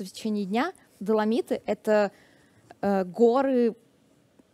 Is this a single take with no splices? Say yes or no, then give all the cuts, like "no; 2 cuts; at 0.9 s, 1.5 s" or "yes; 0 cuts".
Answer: no; 1 cut; at 1.0 s